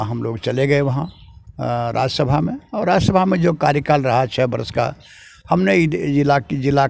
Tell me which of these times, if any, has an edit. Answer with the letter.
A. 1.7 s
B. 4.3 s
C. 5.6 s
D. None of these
D